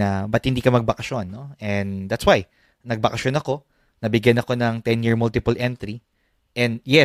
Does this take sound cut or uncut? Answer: uncut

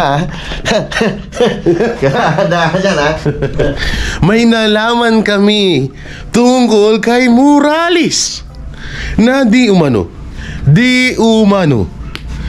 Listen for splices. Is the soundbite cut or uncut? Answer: cut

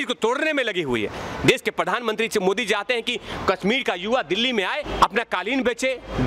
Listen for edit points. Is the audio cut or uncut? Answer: cut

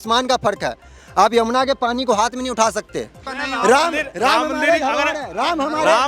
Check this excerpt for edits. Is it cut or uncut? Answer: cut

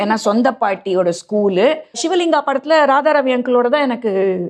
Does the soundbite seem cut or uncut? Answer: cut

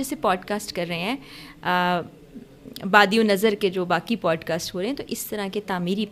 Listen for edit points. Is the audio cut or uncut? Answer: uncut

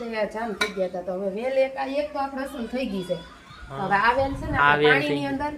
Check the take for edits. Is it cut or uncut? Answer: uncut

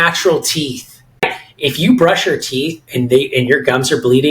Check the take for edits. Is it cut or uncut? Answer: cut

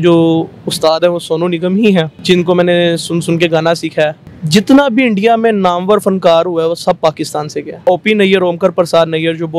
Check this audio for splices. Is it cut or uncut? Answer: cut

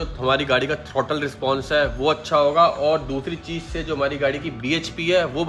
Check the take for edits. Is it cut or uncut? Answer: uncut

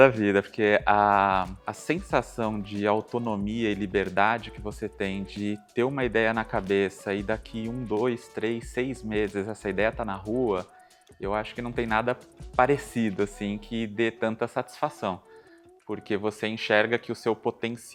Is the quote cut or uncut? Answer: uncut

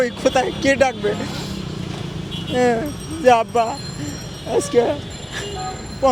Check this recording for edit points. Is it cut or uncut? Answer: uncut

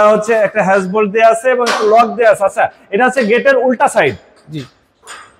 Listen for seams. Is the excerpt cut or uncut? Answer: uncut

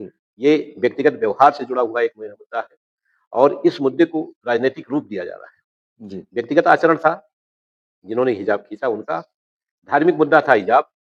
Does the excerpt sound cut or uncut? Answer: uncut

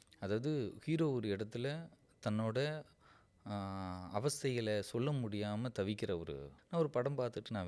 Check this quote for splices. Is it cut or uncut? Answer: cut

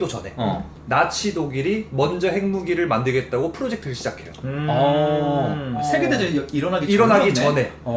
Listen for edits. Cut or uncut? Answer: uncut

